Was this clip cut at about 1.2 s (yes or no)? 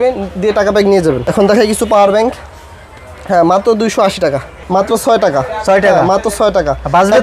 yes